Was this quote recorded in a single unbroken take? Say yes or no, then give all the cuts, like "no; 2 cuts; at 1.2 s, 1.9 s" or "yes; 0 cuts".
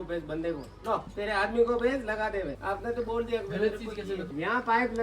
yes; 0 cuts